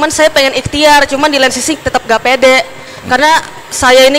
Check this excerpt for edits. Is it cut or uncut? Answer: uncut